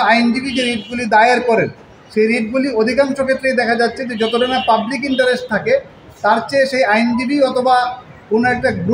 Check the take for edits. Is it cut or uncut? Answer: uncut